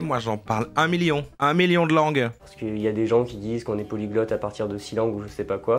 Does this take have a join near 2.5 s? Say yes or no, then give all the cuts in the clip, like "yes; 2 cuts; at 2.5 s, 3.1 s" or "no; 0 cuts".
yes; 1 cut; at 2.5 s